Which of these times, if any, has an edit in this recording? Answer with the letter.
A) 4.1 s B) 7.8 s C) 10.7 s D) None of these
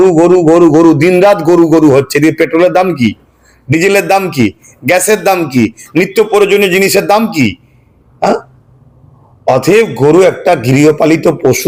D